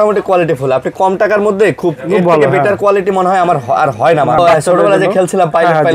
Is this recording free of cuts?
no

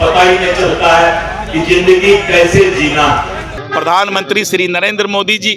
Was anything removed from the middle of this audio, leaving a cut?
yes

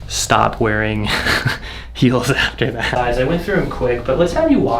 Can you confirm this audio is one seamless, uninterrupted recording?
no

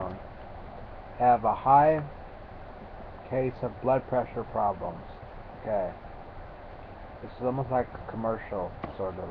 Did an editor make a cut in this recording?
yes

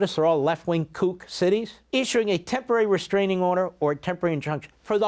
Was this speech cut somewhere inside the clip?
yes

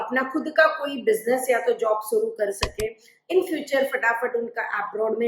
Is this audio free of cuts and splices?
no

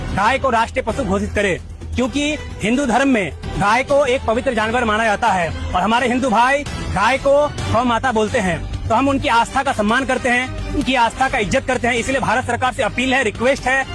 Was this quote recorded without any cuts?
yes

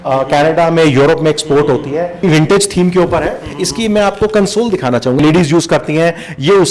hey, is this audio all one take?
no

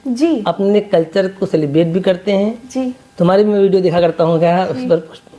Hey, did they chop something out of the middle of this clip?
no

